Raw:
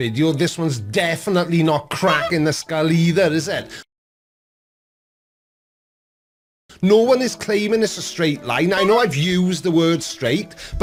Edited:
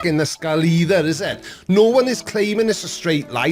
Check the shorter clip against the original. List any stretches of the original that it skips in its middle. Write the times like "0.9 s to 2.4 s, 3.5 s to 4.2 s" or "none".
3.7 s to 6.6 s